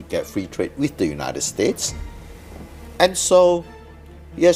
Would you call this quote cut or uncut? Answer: uncut